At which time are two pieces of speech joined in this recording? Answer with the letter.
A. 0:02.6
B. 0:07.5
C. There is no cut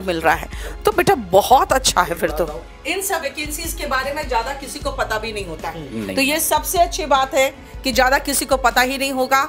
A